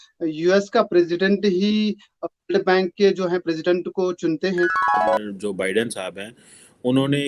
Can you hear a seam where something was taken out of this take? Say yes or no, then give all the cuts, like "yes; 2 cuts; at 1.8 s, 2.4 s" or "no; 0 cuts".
yes; 1 cut; at 5.0 s